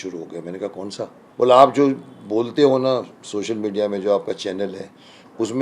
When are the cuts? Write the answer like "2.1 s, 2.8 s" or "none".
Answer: 1.2 s